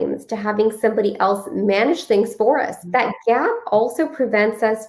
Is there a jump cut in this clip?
yes; 1 cut; at 2.8 s

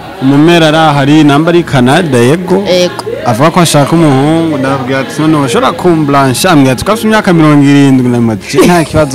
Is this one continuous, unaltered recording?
yes; 0 cuts

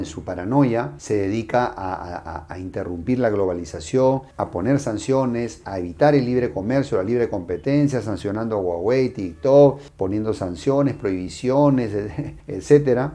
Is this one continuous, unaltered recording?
yes; 0 cuts

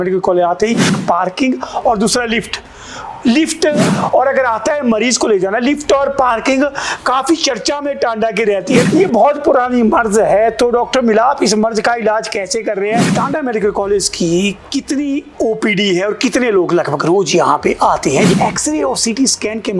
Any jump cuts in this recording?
yes; 5 cuts; at 1.0 s, 3.9 s, 8.9 s, 13.1 s, 18.3 s

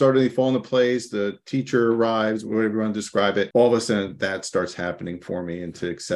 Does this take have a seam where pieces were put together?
yes; 3 cuts; at 2.4 s, 3.5 s, 4.1 s

